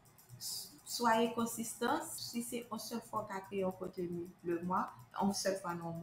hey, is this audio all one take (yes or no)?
no